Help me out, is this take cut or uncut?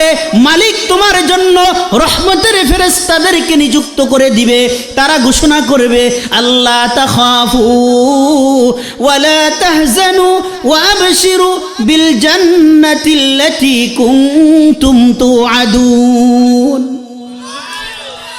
uncut